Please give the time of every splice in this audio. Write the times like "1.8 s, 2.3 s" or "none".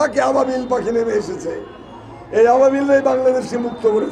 none